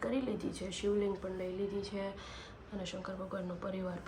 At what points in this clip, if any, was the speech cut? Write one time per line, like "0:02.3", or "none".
none